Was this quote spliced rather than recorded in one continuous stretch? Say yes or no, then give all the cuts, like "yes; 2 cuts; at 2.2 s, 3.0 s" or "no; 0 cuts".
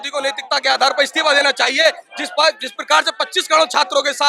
no; 0 cuts